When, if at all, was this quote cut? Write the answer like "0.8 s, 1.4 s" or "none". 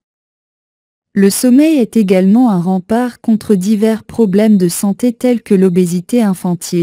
1.7 s